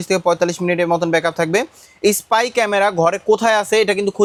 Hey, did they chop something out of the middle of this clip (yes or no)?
no